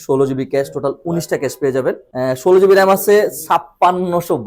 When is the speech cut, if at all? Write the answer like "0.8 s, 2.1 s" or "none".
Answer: 2.1 s